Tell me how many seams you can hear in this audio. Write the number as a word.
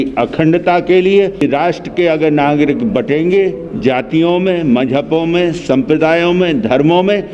one